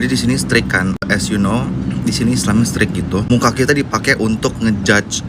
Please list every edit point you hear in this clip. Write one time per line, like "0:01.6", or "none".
none